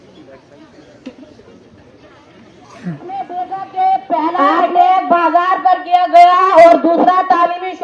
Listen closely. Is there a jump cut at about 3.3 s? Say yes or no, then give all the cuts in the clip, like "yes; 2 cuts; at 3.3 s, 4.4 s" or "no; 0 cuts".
yes; 1 cut; at 3.3 s